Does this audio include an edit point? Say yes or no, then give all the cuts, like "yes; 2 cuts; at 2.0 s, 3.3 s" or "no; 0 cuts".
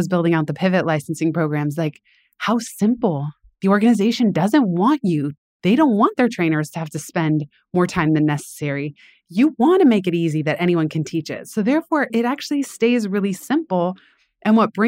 no; 0 cuts